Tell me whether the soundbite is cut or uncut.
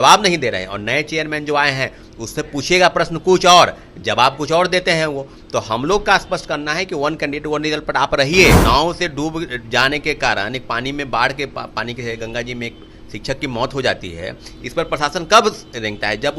cut